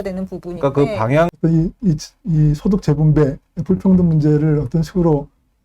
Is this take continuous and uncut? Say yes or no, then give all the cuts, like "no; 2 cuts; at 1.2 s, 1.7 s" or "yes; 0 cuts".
no; 1 cut; at 1.3 s